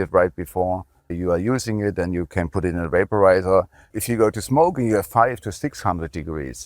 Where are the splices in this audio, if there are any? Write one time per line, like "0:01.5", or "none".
0:01.2
0:03.9